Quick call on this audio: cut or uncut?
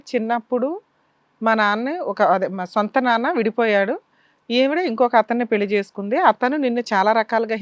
uncut